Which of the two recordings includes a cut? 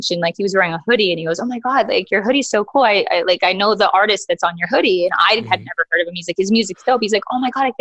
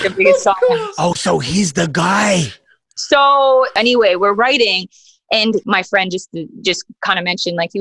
second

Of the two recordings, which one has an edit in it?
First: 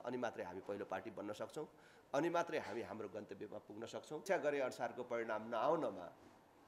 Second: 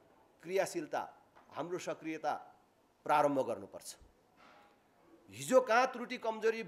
first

